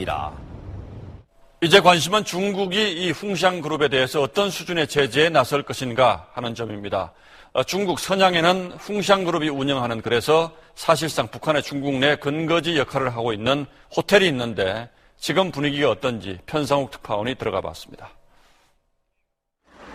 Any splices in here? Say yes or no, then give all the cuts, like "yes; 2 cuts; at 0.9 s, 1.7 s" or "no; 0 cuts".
no; 0 cuts